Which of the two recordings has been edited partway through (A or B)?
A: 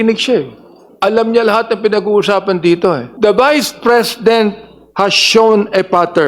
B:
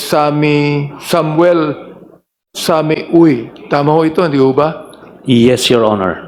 A